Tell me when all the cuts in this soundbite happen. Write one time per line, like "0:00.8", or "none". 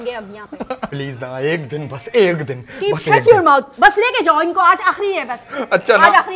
0:00.9